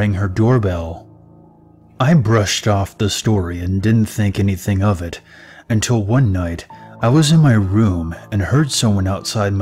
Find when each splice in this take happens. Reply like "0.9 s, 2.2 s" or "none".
5.5 s